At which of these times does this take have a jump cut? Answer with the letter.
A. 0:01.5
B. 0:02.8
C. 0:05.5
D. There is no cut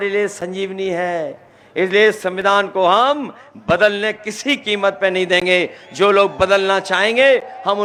D